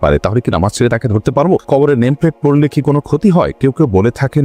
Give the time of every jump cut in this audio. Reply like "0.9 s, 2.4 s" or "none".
1.6 s